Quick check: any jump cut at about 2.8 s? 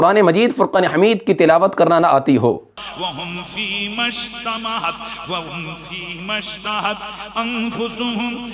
yes; 1 cut; at 2.8 s

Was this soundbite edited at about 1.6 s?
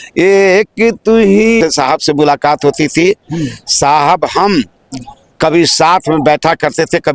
yes; 1 cut; at 1.6 s

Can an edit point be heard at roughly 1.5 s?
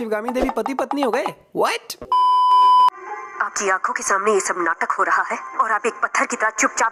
no; 0 cuts

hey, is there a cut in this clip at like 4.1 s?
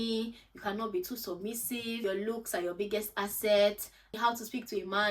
yes; 2 cuts; at 2.0 s, 4.1 s

